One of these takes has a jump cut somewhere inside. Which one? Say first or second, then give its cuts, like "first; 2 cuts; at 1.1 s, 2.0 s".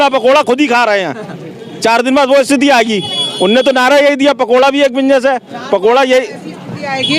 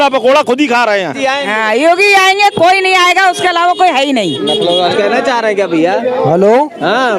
second; 2 cuts; at 1.2 s, 4.9 s